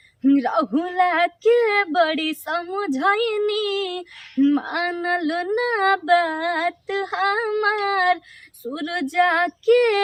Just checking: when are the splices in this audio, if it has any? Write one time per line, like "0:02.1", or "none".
none